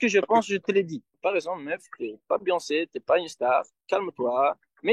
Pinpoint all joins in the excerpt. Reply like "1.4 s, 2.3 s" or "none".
1.1 s